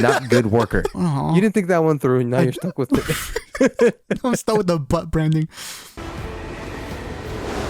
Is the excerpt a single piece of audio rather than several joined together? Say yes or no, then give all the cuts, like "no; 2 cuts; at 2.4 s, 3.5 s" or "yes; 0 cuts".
no; 2 cuts; at 0.9 s, 6.0 s